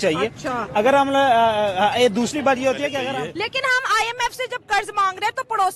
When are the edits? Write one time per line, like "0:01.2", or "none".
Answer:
0:03.0